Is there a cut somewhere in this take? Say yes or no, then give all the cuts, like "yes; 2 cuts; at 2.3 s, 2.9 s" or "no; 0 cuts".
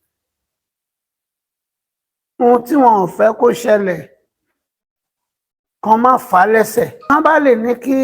yes; 1 cut; at 7.1 s